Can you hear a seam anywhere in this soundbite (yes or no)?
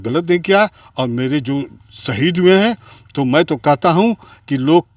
no